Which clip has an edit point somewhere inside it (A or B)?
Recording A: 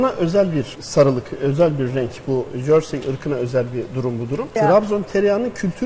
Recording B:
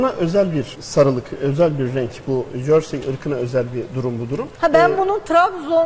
A